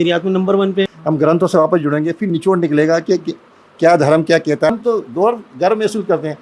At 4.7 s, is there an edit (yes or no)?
yes